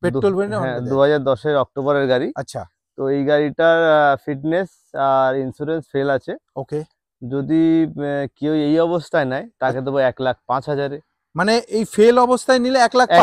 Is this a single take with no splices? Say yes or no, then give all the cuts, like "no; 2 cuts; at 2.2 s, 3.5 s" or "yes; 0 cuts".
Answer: yes; 0 cuts